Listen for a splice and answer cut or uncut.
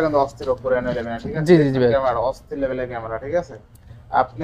uncut